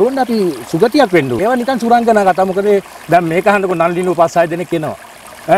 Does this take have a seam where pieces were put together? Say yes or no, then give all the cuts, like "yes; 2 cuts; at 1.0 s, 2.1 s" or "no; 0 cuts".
yes; 1 cut; at 1.3 s